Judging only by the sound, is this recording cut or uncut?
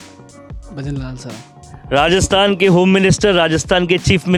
uncut